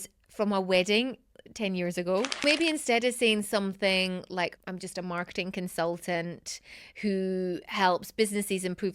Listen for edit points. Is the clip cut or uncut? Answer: cut